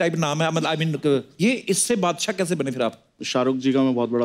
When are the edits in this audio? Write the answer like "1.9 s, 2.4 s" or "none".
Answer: none